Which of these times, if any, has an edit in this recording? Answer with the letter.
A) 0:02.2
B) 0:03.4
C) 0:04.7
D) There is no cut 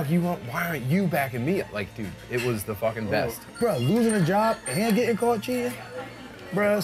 B